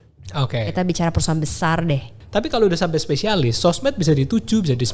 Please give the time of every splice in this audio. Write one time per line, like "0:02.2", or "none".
0:02.2